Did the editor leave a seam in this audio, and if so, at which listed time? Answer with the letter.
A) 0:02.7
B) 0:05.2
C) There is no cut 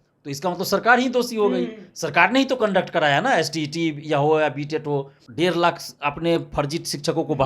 B